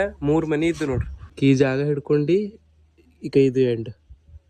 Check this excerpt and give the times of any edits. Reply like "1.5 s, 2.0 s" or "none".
1.3 s